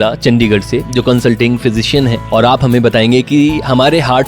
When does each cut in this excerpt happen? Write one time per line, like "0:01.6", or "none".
0:02.2